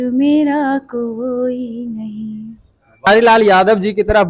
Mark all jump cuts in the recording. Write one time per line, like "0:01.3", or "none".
0:03.0